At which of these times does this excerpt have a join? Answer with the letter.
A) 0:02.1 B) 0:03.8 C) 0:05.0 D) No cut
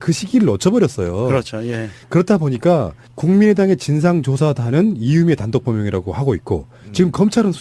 B